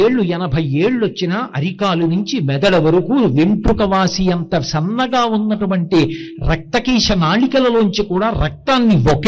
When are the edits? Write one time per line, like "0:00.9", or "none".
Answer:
none